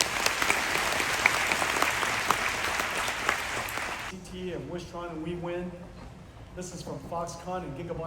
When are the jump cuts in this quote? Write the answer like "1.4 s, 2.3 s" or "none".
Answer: 4.1 s